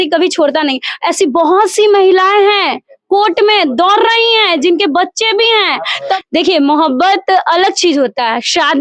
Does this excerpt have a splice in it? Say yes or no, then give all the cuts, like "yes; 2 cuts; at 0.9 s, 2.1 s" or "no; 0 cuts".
yes; 1 cut; at 6.1 s